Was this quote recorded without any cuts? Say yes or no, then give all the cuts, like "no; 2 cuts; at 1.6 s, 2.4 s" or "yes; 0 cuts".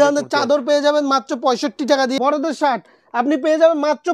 no; 1 cut; at 2.1 s